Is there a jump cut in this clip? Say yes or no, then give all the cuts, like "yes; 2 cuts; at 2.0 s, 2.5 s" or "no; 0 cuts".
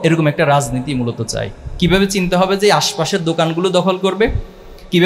yes; 1 cut; at 1.6 s